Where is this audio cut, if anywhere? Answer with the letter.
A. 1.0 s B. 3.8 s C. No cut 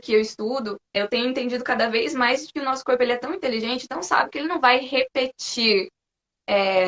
A